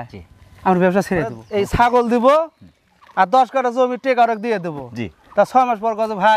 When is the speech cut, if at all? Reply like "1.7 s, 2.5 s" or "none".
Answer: 1.3 s